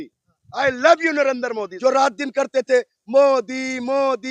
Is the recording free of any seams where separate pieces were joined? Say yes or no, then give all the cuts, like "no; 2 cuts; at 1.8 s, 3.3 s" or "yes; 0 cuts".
no; 1 cut; at 1.7 s